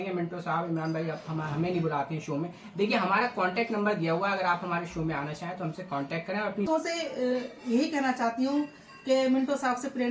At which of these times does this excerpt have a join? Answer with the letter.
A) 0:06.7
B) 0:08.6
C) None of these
A